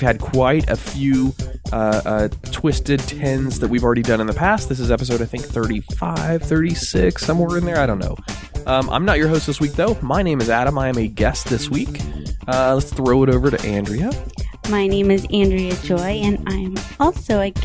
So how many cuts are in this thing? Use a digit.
1